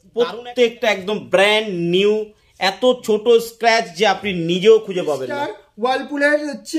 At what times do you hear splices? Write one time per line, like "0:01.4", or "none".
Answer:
0:05.6